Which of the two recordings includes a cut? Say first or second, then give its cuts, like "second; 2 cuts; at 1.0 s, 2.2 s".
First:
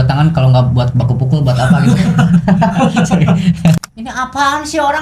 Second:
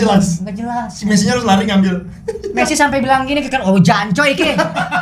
first; 1 cut; at 3.9 s